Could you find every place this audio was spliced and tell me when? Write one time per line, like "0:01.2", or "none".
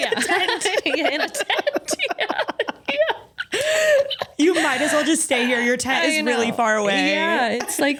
none